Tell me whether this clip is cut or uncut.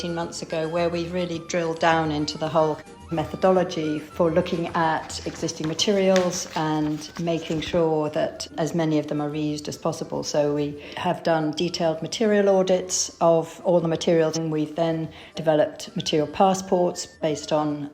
cut